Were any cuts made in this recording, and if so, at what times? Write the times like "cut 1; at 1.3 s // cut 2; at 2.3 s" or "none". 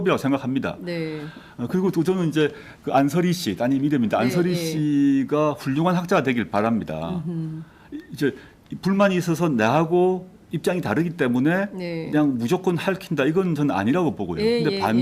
cut 1; at 9.5 s